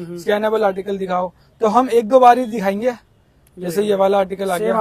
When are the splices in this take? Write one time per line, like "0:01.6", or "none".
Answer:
none